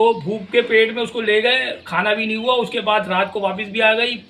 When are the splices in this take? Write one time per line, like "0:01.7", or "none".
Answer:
none